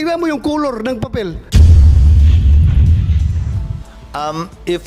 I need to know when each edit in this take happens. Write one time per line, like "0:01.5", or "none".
0:01.4
0:03.6